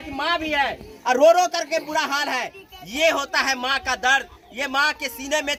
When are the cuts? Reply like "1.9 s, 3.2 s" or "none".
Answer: none

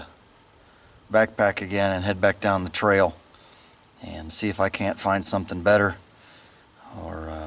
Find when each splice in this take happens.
none

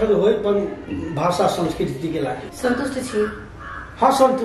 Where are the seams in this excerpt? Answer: 2.4 s

